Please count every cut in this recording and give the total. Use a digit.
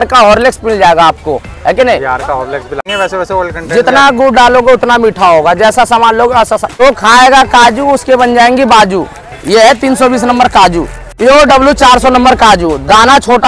3